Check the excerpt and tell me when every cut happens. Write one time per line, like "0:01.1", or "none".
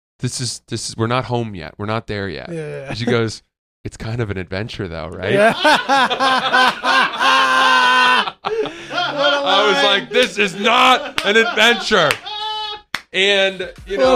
none